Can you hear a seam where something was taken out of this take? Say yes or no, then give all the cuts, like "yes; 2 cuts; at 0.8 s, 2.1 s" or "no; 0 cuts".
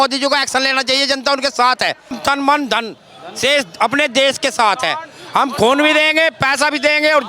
yes; 1 cut; at 2.2 s